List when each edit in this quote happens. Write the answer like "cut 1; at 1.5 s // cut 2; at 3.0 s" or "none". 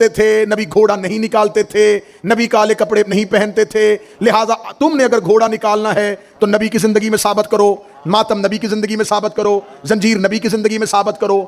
none